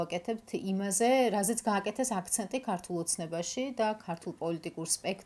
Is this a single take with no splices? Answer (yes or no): yes